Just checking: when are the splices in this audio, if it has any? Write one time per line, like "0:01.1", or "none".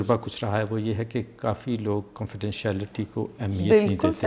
none